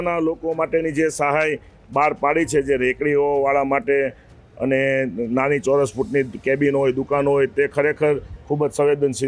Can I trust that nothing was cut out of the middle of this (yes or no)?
yes